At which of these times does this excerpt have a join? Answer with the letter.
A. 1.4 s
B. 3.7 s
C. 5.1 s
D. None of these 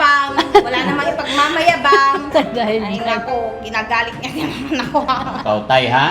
D